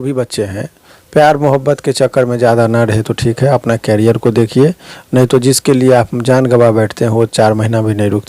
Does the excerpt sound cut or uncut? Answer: uncut